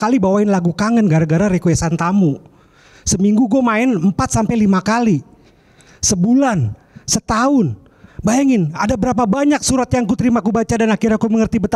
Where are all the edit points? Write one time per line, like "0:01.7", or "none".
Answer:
none